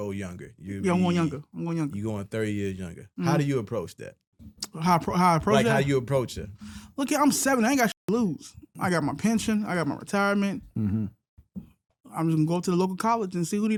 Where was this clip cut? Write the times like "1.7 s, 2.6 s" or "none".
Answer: none

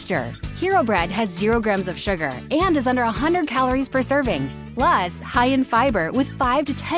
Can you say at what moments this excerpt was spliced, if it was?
4.6 s

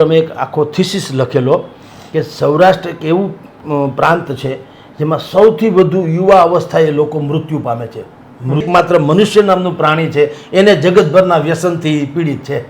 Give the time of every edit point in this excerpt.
8.7 s

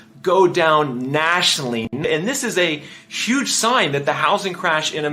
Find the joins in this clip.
2.0 s

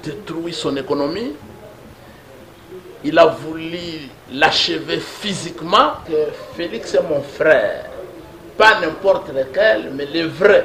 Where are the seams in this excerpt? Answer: 6.0 s

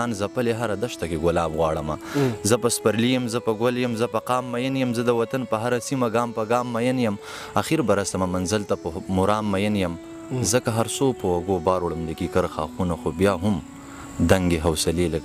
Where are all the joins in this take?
none

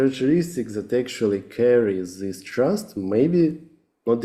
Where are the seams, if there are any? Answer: none

